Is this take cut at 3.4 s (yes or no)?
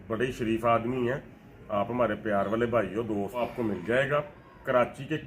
yes